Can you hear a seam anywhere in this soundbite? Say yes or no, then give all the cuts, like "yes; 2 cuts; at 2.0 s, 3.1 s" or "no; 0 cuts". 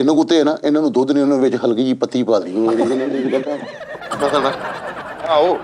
no; 0 cuts